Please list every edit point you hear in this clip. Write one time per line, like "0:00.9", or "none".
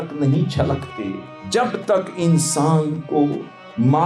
0:01.3

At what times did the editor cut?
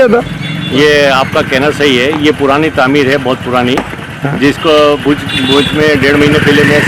none

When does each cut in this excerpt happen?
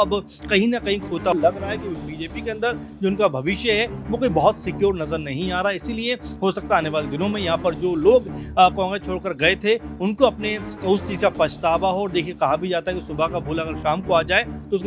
0:01.3

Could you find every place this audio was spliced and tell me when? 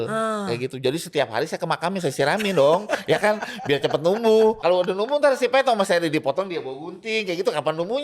0:04.6

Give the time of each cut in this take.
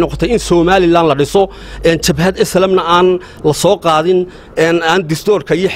none

